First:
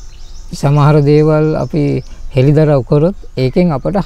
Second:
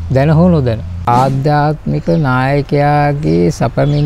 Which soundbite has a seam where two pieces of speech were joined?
second; 1 cut; at 1.0 s

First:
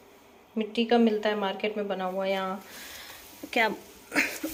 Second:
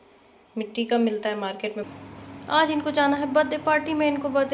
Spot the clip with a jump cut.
second; 1 cut; at 1.9 s

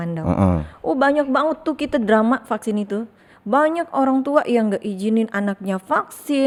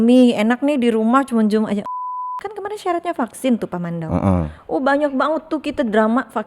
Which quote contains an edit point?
second; 1 cut; at 2.0 s

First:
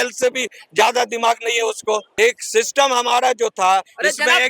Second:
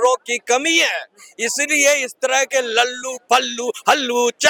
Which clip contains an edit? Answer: first; 1 cut; at 2.1 s

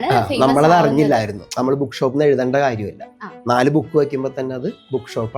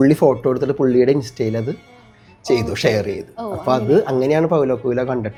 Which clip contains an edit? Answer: first; 1 cut; at 1.4 s

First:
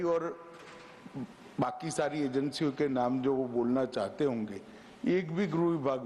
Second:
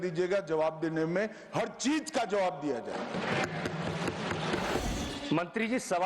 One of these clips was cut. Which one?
second; 1 cut; at 4.8 s

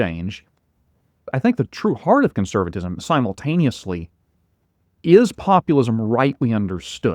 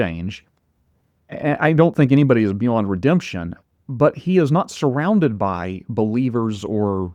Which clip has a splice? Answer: first; 1 cut; at 1.3 s

